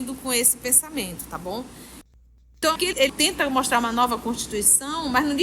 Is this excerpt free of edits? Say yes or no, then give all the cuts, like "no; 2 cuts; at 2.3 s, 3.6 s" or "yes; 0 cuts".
no; 1 cut; at 2.2 s